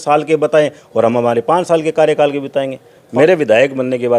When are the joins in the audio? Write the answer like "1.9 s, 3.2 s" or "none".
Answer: 3.0 s